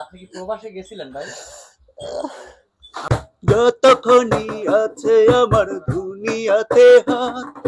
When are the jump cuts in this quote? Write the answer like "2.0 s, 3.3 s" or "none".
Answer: 3.0 s